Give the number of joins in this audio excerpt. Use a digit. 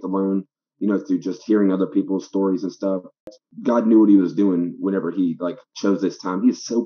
1